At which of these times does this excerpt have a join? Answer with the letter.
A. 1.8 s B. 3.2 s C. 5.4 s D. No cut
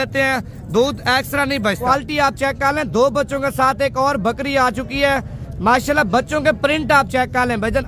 A